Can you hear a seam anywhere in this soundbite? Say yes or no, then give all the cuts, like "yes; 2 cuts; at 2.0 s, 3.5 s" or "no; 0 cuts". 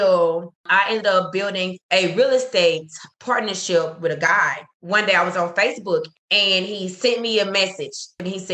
no; 0 cuts